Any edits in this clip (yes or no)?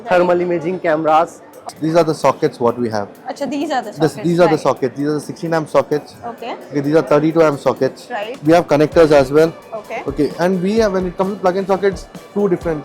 yes